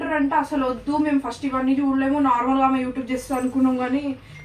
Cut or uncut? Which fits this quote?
uncut